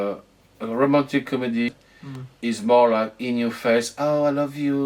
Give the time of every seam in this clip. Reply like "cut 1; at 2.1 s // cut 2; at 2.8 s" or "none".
cut 1; at 1.7 s